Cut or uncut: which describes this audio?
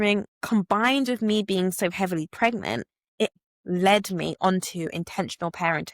cut